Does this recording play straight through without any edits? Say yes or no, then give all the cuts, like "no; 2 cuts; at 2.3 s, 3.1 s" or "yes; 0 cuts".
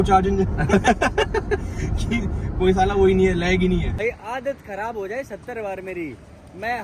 no; 1 cut; at 4.0 s